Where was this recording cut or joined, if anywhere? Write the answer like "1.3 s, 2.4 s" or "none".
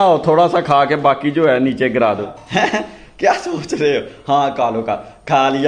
2.3 s